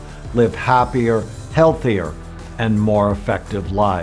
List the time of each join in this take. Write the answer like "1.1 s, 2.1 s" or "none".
none